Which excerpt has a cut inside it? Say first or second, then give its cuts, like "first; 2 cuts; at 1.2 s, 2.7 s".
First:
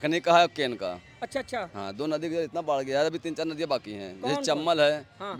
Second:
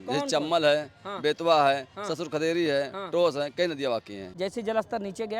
second; 1 cut; at 4.3 s